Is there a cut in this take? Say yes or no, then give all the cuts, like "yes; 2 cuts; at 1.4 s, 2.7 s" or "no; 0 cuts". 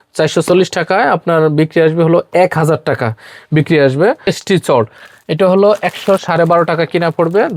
yes; 1 cut; at 4.4 s